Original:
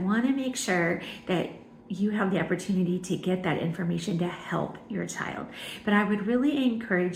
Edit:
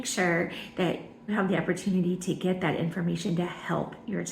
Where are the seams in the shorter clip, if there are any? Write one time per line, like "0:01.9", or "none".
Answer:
0:01.3